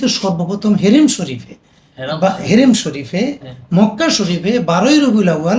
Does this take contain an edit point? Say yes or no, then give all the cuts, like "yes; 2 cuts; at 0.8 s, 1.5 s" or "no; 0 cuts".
no; 0 cuts